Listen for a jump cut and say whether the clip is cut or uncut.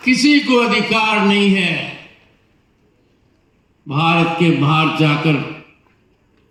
uncut